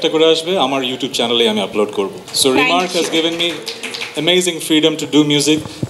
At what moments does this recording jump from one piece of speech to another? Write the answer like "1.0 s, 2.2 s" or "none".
2.2 s

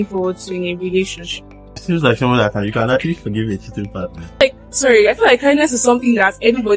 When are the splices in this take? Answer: 1.8 s, 4.4 s

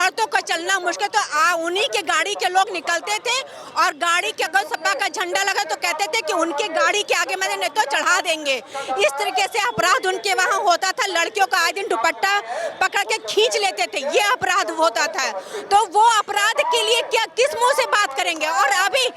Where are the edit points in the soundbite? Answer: none

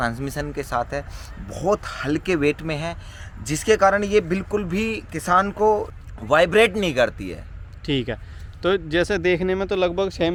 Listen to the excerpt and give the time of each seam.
none

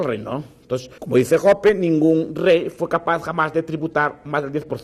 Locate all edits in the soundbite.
0.9 s

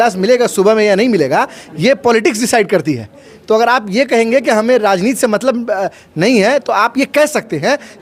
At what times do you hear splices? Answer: none

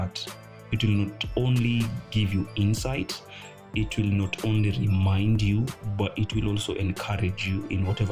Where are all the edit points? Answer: none

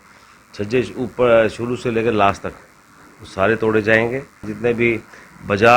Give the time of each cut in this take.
4.5 s

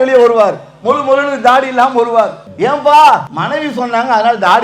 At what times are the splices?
2.4 s, 3.3 s

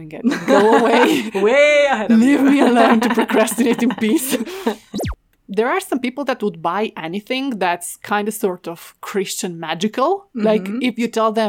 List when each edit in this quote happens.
5.3 s

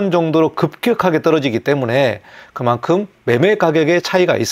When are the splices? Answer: none

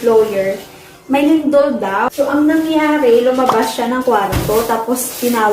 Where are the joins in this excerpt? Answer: 2.1 s

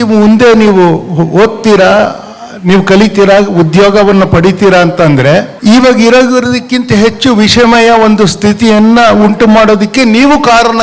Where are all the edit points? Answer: 5.5 s

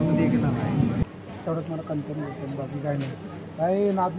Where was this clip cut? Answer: 1.0 s

